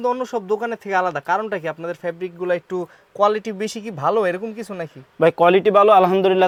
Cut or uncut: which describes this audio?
uncut